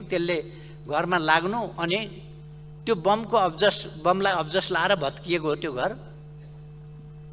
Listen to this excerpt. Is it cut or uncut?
uncut